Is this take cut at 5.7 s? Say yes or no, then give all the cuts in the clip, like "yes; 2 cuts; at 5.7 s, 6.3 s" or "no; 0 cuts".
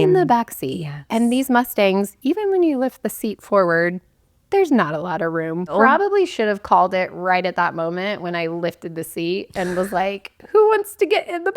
yes; 1 cut; at 5.7 s